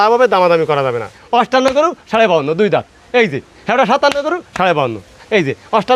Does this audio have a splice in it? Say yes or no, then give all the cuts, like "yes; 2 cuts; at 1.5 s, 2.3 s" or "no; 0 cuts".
yes; 1 cut; at 1.1 s